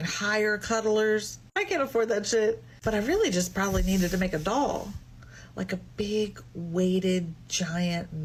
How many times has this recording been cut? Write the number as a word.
zero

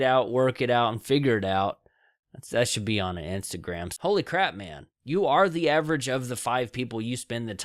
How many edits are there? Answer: one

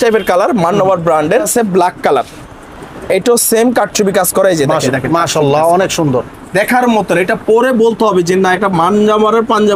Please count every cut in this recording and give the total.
two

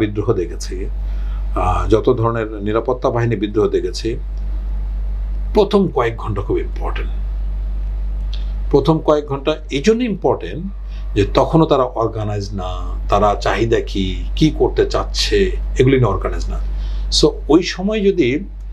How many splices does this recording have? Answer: zero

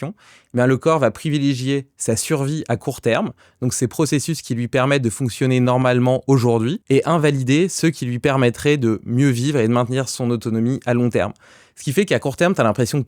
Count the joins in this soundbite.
one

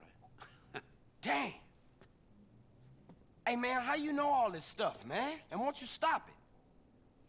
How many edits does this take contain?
zero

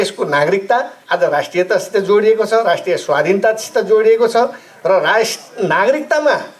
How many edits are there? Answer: one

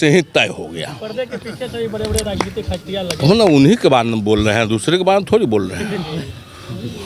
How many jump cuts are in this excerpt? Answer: zero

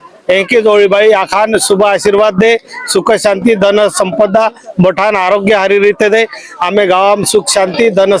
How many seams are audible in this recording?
zero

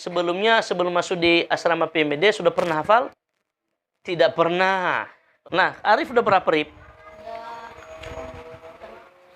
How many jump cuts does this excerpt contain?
one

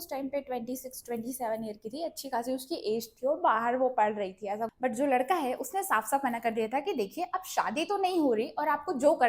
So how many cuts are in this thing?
one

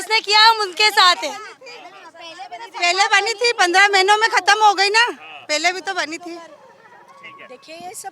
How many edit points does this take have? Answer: zero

